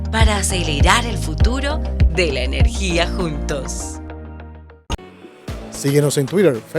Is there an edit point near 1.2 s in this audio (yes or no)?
no